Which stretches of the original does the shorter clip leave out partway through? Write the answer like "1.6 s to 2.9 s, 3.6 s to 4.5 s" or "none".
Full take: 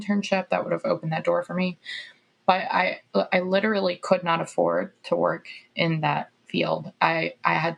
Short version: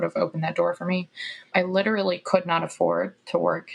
2.2 s to 3.3 s